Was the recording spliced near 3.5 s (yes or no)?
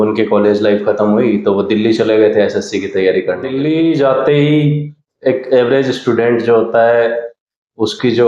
yes